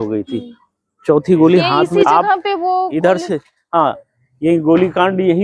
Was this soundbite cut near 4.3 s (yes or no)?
no